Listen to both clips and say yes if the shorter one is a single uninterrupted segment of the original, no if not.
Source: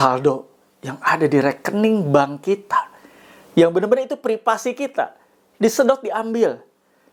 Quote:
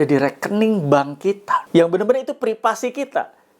no